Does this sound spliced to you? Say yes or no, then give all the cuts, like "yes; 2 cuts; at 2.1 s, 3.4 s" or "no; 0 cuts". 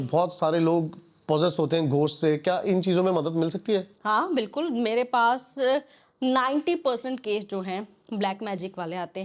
no; 0 cuts